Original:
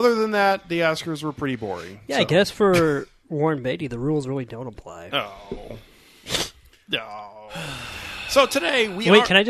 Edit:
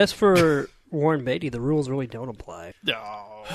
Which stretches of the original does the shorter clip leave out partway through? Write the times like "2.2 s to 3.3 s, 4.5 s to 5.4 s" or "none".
5.0 s to 6.7 s